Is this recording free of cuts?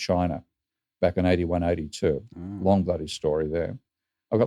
yes; 0 cuts

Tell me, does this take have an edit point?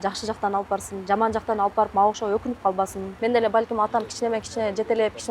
yes; 1 cut; at 3.0 s

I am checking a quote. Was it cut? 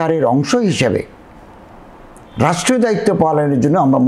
no; 0 cuts

